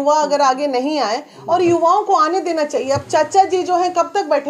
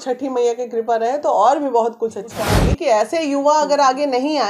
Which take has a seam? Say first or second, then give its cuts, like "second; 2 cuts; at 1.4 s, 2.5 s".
second; 1 cut; at 2.4 s